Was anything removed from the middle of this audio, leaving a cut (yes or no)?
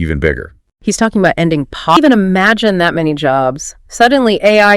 yes